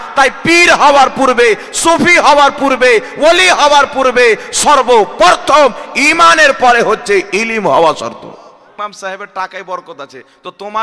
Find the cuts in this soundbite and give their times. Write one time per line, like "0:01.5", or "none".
0:08.7

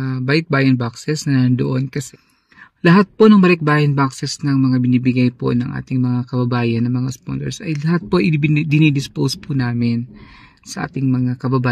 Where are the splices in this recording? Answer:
0:02.0

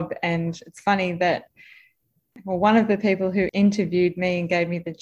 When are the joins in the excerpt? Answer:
0:02.2
0:03.5

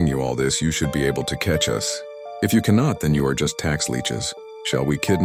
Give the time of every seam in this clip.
none

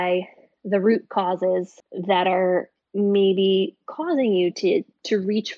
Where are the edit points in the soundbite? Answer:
none

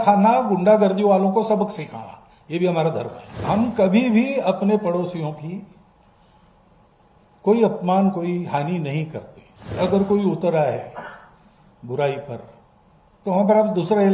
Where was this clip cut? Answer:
0:03.4
0:09.8

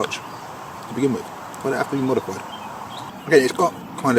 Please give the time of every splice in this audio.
none

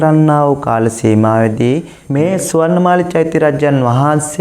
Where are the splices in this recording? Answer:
0:02.0

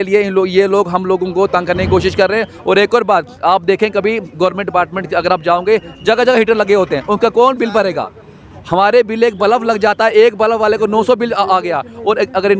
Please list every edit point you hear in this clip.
none

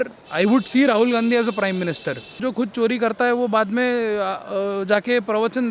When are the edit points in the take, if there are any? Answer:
0:02.4

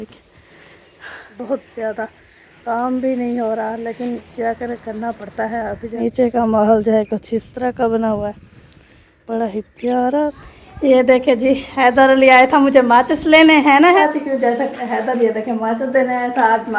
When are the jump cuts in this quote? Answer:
0:01.2
0:05.9
0:10.4
0:14.0

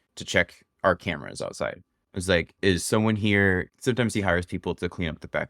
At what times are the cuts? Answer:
0:03.7

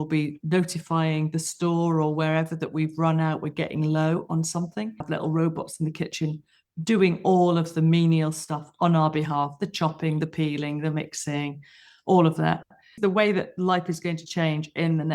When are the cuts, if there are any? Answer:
0:05.0
0:13.0

